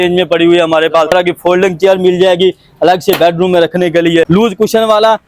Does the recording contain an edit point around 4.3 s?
yes; 2 cuts; at 1.1 s, 4.3 s

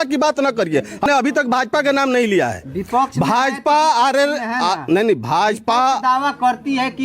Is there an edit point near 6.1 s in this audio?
no; 1 cut; at 1.1 s

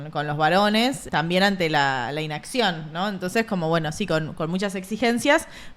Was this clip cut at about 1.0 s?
yes; 1 cut; at 1.0 s

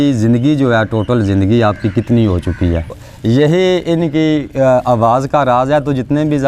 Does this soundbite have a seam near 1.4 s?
no; 1 cut; at 2.9 s

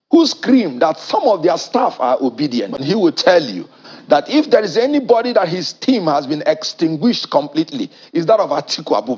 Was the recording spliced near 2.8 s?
yes; 1 cut; at 2.8 s

